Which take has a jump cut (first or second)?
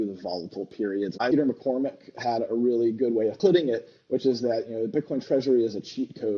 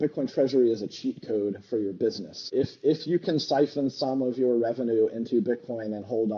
first